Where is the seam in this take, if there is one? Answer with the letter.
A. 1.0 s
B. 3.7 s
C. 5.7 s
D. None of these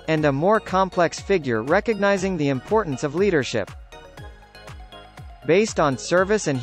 D